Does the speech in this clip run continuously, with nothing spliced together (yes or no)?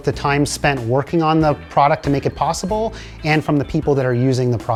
yes